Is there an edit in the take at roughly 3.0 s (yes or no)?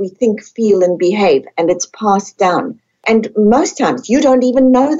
yes